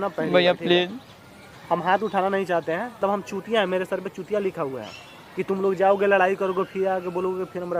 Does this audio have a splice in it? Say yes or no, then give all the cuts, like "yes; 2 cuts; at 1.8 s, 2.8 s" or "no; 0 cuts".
yes; 1 cut; at 3.0 s